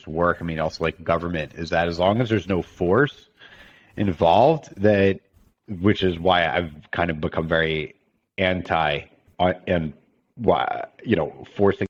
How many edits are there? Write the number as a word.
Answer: zero